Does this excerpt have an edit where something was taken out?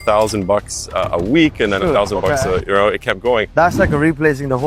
no; 0 cuts

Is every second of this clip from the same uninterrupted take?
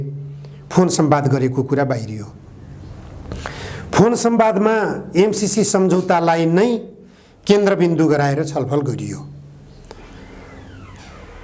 yes; 0 cuts

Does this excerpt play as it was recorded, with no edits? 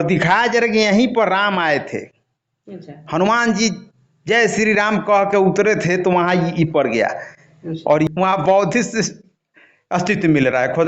no; 1 cut; at 8.1 s

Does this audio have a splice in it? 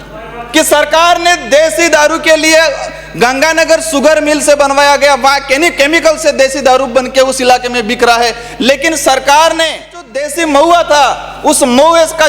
yes; 1 cut; at 10.3 s

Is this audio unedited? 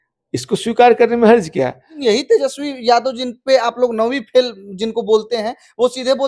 no; 1 cut; at 1.9 s

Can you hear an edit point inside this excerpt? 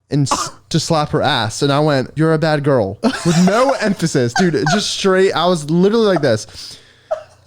yes; 1 cut; at 2.1 s

